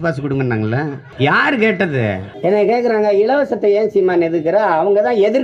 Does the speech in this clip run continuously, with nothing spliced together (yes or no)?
no